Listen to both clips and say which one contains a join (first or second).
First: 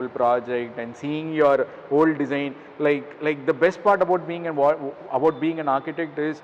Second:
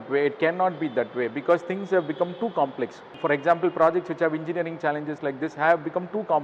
second